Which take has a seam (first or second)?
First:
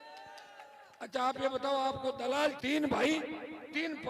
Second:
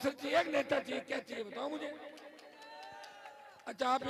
first